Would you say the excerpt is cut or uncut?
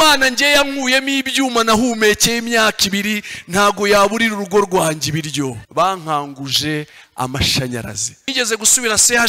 cut